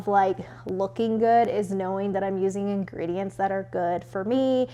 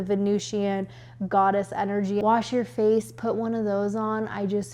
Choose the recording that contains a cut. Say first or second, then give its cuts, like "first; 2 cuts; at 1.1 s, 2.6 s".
second; 1 cut; at 2.2 s